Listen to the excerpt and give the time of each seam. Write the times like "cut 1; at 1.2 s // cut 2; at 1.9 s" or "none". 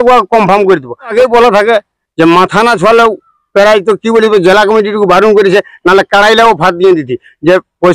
cut 1; at 1.1 s